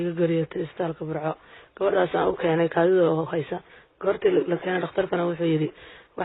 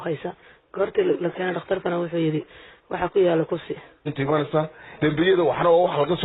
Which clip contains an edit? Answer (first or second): second